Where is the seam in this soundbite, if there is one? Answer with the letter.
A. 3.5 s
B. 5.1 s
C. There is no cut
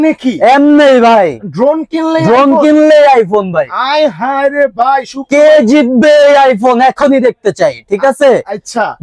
C